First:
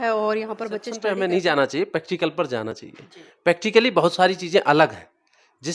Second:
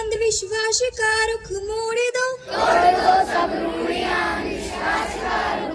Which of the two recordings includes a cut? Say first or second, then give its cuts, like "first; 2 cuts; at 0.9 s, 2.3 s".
first; 1 cut; at 0.9 s